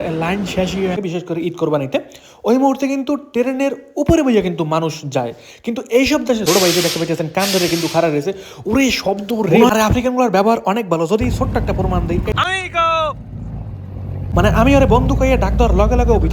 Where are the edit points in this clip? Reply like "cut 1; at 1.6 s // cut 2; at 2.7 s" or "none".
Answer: cut 1; at 1.0 s // cut 2; at 6.4 s // cut 3; at 9.7 s // cut 4; at 12.3 s // cut 5; at 14.3 s

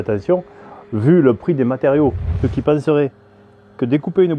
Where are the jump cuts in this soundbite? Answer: cut 1; at 2.3 s

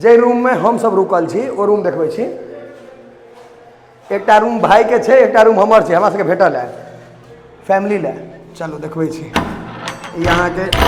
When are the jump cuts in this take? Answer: none

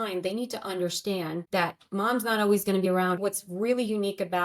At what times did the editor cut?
cut 1; at 1.4 s // cut 2; at 3.0 s

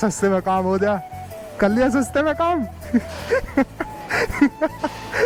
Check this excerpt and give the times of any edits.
none

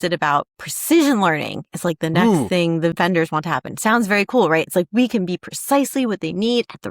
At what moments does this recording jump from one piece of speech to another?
cut 1; at 2.9 s

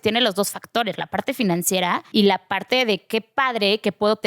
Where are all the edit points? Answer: cut 1; at 2.0 s

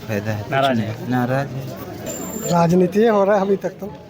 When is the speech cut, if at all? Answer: cut 1; at 2.0 s

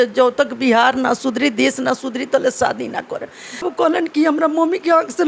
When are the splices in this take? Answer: cut 1; at 3.7 s

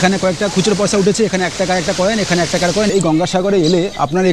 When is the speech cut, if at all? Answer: cut 1; at 2.9 s

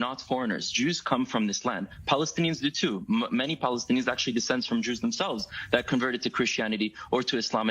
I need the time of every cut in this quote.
none

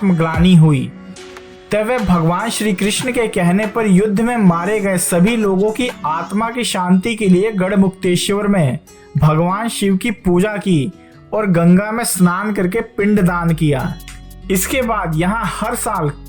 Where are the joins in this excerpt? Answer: none

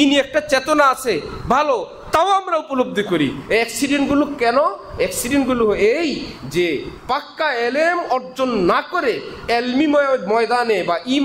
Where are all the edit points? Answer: none

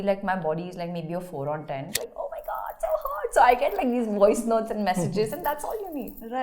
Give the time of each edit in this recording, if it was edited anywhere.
cut 1; at 2.0 s

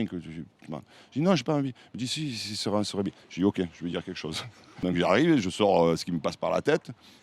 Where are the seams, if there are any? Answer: cut 1; at 4.8 s

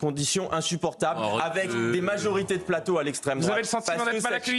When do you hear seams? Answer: none

